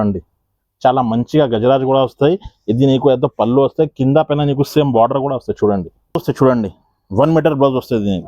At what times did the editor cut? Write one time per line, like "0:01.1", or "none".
0:06.2